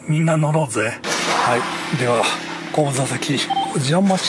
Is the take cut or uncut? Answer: cut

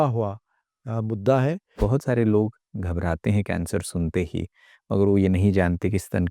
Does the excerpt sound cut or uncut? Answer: cut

